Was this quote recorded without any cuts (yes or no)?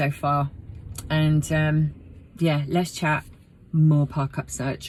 yes